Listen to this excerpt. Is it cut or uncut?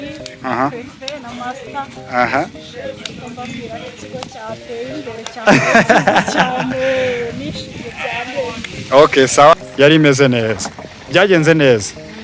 cut